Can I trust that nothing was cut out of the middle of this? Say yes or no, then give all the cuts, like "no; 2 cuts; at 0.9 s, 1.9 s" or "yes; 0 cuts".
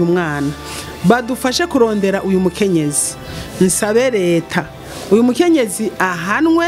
yes; 0 cuts